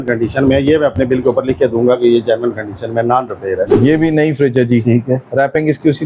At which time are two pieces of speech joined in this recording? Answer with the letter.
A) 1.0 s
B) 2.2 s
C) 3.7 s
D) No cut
C